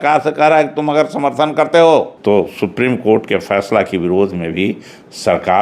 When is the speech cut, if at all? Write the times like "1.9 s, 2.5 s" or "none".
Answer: 2.1 s